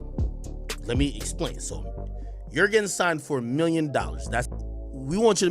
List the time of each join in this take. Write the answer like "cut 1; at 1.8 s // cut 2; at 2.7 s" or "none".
cut 1; at 4.6 s